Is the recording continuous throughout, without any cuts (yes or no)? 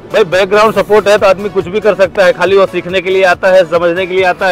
yes